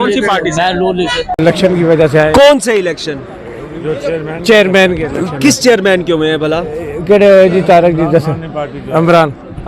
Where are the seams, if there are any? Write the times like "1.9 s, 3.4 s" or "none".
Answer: 1.4 s